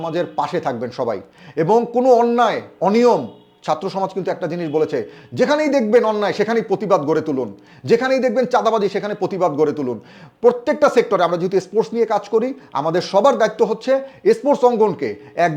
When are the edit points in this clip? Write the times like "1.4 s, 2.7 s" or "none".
none